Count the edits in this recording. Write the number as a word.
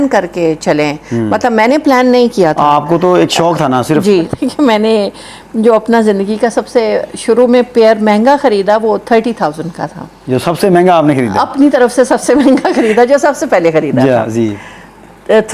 one